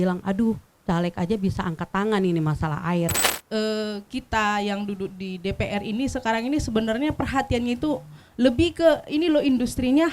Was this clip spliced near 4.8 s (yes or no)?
no